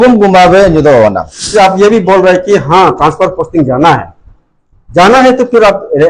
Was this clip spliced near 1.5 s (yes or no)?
yes